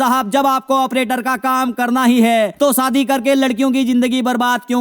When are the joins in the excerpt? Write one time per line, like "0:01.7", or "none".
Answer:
none